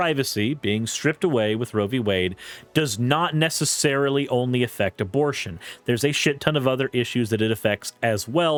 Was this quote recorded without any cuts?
yes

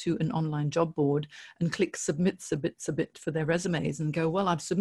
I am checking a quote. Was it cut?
no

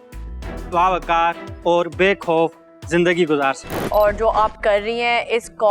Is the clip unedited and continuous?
no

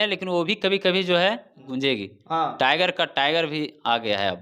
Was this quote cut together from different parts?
yes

